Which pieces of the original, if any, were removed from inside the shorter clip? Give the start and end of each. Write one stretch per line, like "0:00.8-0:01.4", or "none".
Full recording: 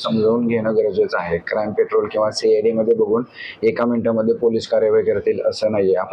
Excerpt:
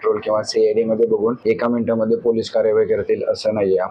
0:03.3-0:03.6